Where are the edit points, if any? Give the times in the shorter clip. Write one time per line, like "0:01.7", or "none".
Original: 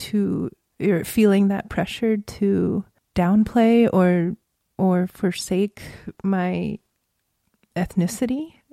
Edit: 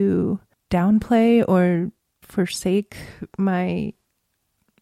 0:02.3